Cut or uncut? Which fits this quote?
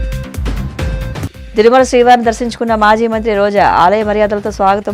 cut